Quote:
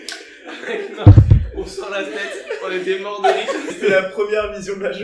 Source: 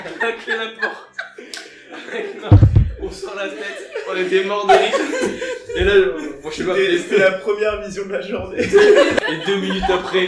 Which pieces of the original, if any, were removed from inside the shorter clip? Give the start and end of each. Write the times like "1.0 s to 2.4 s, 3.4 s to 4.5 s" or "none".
5.2 s to 7.0 s

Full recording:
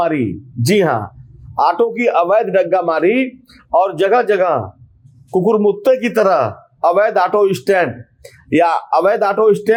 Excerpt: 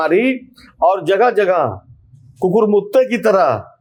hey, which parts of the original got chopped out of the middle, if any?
none

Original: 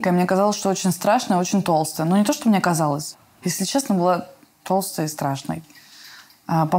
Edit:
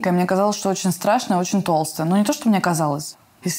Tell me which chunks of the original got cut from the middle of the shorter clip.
none

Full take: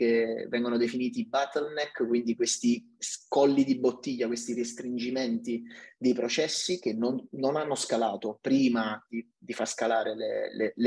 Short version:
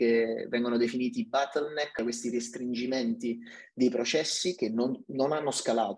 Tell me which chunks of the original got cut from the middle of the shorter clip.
2.0 s to 4.2 s

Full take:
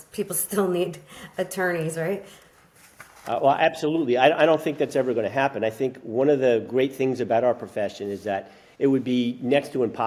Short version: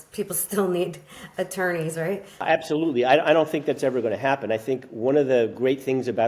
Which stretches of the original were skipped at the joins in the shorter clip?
2.4 s to 3.6 s

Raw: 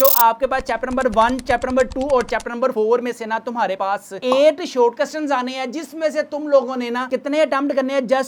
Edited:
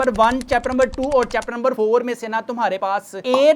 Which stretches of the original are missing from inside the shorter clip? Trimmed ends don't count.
none

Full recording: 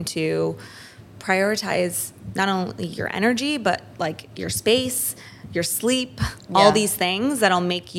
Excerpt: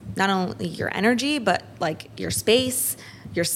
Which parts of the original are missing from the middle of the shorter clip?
none

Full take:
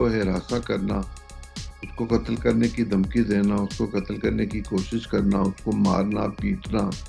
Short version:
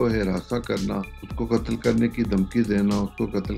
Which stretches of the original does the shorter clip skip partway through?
1.2 s to 1.8 s

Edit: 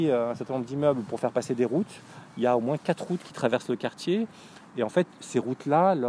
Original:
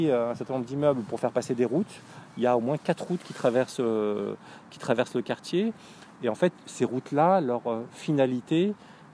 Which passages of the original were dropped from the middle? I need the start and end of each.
3.2 s to 4.7 s

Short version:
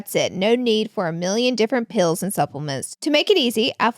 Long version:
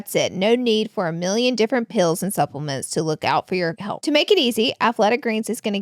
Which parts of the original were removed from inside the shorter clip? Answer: 2.9 s to 3.9 s

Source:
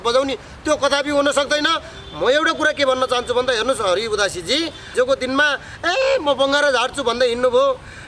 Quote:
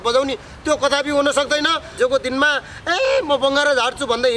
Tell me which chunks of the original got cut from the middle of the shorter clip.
1.8 s to 4.8 s

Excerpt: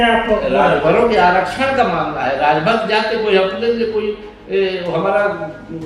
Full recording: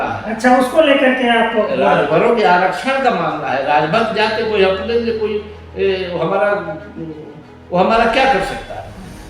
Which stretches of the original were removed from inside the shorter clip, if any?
none

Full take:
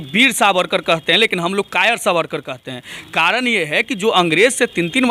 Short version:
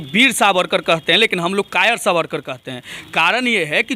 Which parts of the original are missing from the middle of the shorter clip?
none

